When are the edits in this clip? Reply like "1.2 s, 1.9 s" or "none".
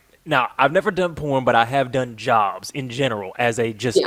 none